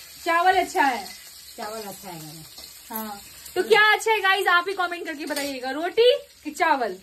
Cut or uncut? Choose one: uncut